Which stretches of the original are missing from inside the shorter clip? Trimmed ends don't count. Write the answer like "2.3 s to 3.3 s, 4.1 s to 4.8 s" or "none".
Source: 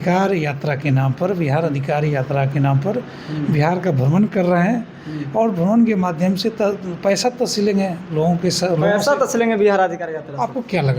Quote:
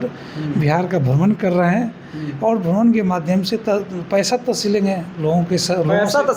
none